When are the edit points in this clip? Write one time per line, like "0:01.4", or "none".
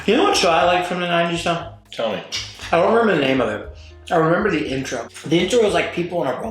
0:05.0